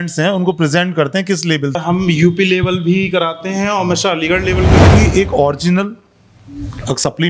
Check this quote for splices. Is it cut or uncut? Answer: cut